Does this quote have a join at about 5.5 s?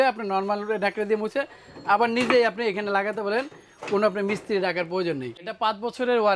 yes; 1 cut; at 5.5 s

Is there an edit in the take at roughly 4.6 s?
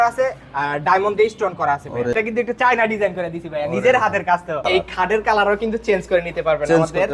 yes; 2 cuts; at 2.1 s, 4.6 s

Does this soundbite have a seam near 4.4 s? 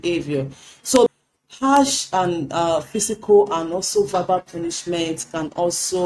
no; 1 cut; at 1.1 s

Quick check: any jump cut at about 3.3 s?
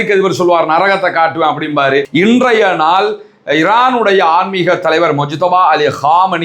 no; 1 cut; at 2.0 s

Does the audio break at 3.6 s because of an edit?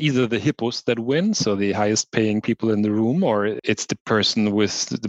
yes; 1 cut; at 3.6 s

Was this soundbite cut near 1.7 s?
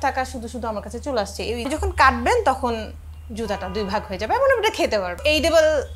yes; 2 cuts; at 1.7 s, 5.2 s

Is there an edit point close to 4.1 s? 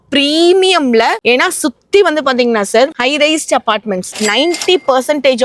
yes; 1 cut; at 4.1 s

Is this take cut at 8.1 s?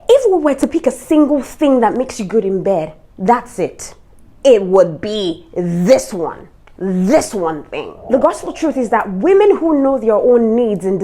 yes; 1 cut; at 8.1 s

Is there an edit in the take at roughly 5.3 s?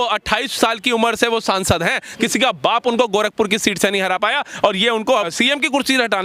yes; 1 cut; at 5.3 s

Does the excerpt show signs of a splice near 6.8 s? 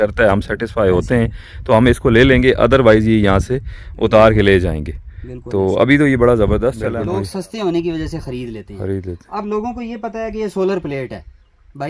yes; 1 cut; at 6.8 s

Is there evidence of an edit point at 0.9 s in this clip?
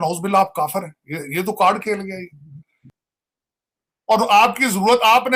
no; 1 cut; at 2.9 s

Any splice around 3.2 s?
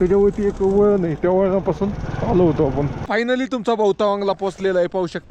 yes; 1 cut; at 3.2 s

